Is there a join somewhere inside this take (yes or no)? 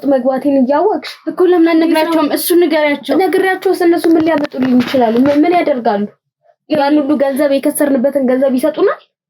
no